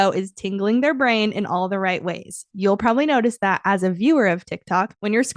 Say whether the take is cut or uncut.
uncut